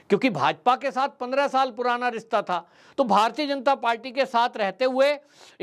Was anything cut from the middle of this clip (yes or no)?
no